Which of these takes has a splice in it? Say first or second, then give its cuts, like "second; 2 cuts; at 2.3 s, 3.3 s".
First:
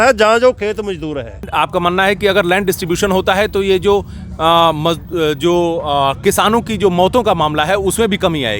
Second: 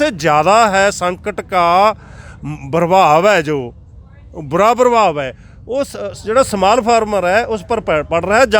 first; 1 cut; at 1.4 s